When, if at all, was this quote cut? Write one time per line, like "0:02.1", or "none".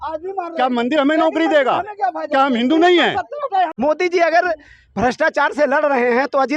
0:03.7